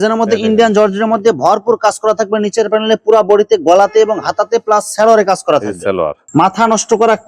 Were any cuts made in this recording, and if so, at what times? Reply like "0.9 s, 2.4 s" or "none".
6.2 s